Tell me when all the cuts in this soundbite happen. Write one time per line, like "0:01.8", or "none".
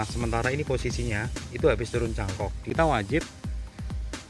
0:02.6